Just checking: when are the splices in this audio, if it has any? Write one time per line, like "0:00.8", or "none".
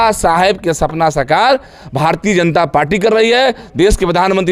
none